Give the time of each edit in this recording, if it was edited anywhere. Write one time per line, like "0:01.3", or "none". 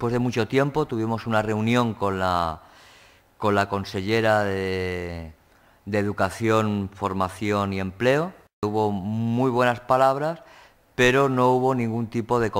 0:08.6